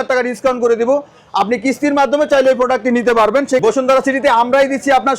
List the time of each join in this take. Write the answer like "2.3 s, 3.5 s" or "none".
3.6 s